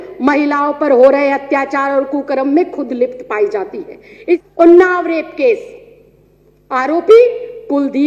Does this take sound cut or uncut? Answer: cut